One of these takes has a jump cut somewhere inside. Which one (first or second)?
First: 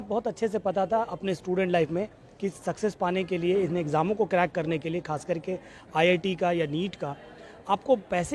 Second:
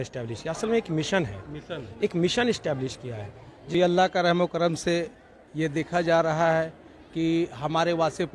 second